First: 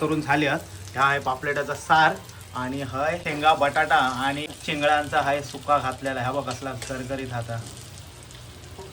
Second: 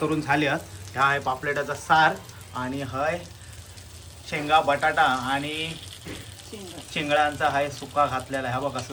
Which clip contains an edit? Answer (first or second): first